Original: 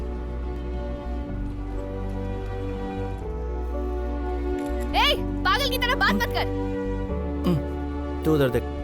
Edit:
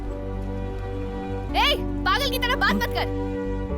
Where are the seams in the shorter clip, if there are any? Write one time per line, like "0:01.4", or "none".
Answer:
0:01.5